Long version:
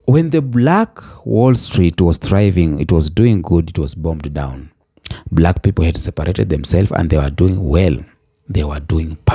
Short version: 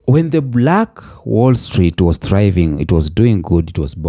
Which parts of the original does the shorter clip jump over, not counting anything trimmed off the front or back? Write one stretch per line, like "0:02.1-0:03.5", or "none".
none